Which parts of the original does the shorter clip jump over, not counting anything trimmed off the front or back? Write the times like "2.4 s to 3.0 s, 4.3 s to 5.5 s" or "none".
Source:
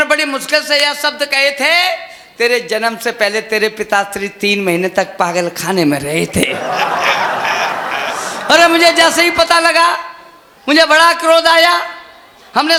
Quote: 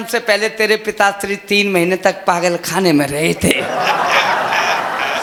none